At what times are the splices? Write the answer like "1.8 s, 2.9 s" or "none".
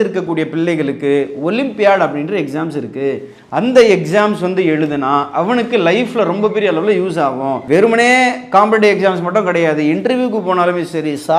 7.6 s